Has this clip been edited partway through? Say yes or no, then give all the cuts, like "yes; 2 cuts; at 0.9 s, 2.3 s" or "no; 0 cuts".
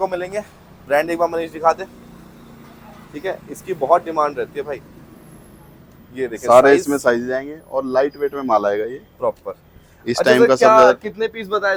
no; 0 cuts